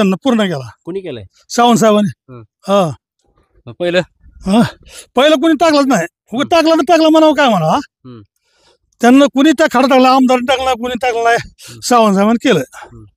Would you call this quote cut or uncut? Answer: uncut